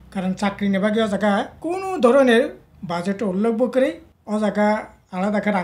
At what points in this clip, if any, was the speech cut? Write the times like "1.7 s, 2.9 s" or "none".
1.6 s, 4.1 s